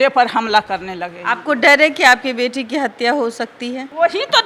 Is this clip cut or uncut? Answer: uncut